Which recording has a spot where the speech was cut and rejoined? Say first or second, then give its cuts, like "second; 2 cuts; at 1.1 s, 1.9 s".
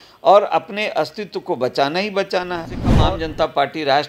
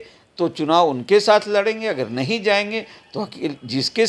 first; 1 cut; at 2.8 s